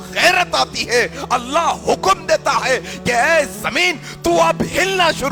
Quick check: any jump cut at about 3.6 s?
no; 0 cuts

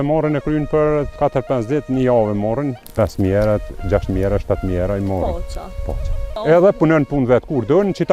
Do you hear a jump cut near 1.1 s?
yes; 3 cuts; at 1.1 s, 2.8 s, 6.4 s

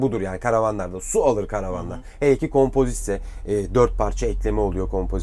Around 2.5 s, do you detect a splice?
no; 0 cuts

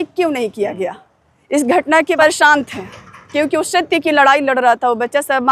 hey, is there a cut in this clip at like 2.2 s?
yes; 1 cut; at 2.2 s

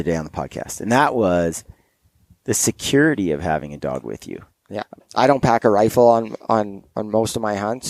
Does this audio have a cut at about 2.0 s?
no; 1 cut; at 5.0 s

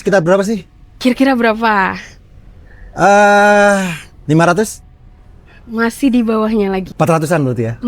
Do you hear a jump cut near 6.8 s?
yes; 2 cuts; at 4.1 s, 6.8 s

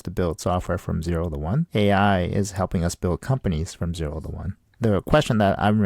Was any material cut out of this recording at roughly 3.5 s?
no; 2 cuts; at 1.7 s, 4.7 s

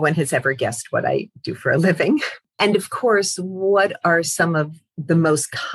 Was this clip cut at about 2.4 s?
yes; 1 cut; at 2.4 s

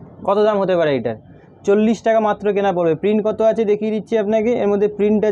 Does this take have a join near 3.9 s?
no; 0 cuts

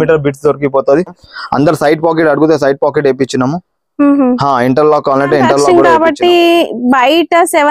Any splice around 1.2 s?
yes; 2 cuts; at 1.2 s, 5.7 s

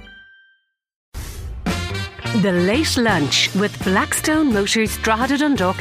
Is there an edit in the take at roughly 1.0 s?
yes; 1 cut; at 1.0 s

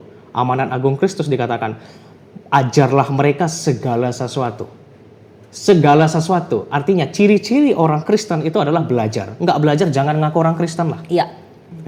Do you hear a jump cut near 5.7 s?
no; 0 cuts

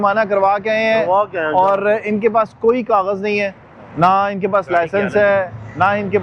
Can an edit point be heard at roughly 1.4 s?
no; 0 cuts

